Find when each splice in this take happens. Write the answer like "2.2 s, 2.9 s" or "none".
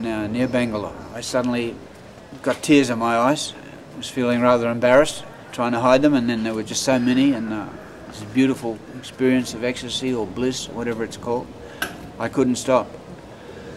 1.1 s

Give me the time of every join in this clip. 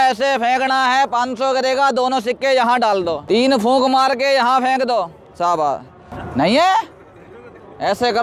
3.2 s, 6.2 s

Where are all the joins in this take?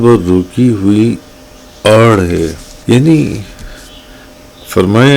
2.7 s

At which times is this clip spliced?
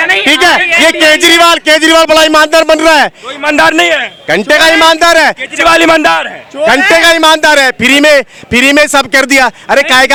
none

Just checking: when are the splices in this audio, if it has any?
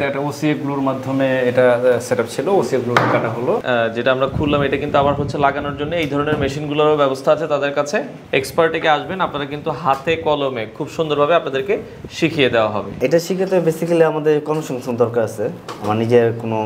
3.6 s, 8.2 s, 13.0 s

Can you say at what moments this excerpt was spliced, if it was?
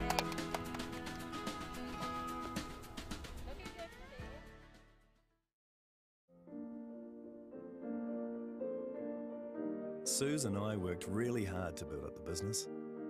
6.0 s

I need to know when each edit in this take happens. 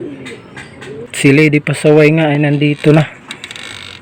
1.1 s

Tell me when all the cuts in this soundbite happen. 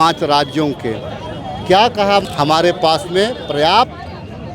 2.3 s

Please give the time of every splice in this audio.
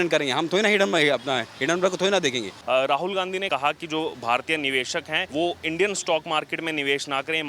2.5 s, 3.5 s, 5.2 s

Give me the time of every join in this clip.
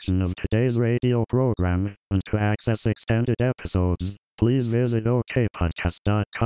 none

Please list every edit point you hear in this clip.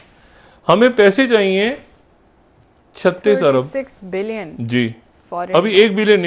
none

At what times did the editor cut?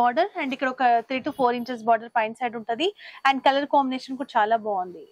none

